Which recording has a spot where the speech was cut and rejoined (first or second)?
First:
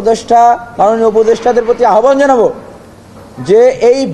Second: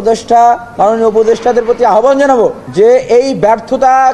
second